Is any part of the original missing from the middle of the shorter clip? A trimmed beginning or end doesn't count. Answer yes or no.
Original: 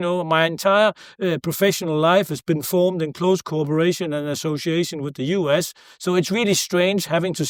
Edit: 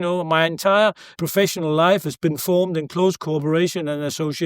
yes